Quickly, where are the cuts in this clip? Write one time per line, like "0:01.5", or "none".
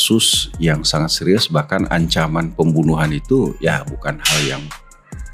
none